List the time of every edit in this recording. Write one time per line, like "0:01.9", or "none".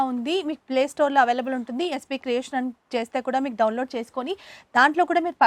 none